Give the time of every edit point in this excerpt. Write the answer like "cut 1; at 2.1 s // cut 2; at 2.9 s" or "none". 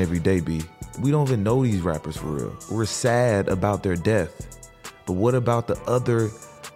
cut 1; at 0.9 s // cut 2; at 2.6 s